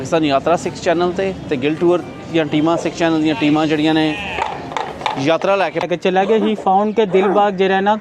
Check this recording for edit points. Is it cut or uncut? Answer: cut